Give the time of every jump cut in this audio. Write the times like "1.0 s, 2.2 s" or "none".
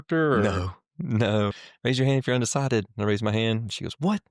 1.7 s